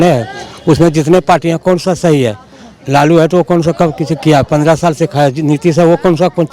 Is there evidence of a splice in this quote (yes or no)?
no